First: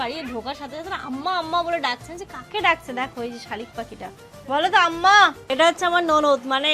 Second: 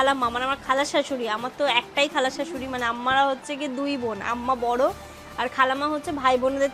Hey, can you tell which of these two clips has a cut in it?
first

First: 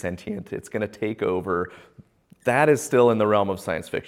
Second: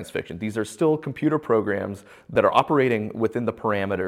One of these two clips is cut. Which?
second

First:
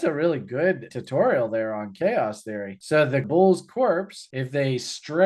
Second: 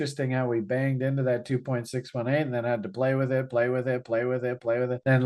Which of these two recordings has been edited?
first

